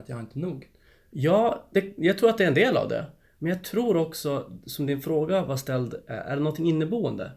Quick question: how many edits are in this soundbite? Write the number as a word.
zero